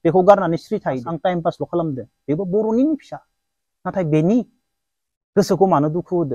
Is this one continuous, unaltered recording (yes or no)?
no